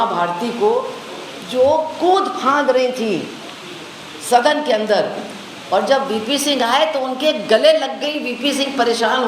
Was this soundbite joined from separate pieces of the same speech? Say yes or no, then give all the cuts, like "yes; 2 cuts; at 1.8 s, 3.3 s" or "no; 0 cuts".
no; 0 cuts